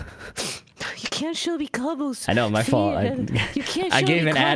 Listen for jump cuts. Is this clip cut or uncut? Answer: uncut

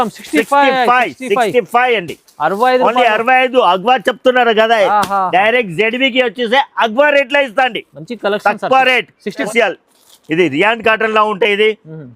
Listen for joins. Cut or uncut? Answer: cut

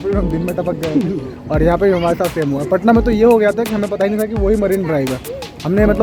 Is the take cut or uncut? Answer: uncut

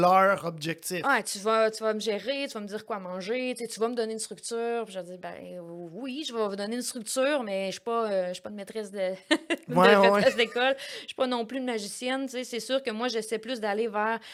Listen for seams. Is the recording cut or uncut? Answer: uncut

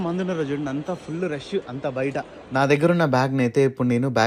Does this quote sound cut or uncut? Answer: uncut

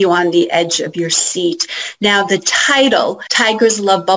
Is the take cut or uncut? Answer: cut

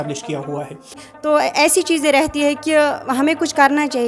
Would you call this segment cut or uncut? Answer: cut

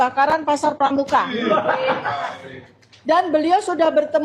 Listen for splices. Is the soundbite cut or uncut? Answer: uncut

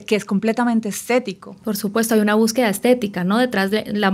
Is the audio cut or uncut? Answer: uncut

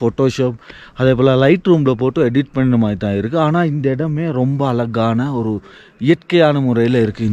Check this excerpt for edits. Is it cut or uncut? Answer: uncut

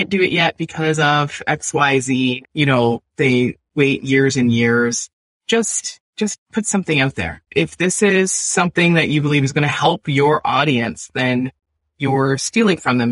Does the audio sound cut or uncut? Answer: uncut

